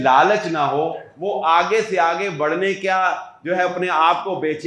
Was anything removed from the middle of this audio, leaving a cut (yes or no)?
no